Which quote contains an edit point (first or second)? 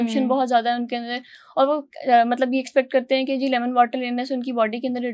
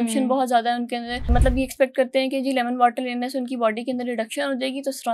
second